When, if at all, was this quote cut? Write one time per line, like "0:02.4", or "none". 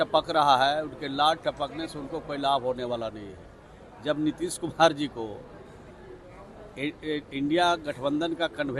none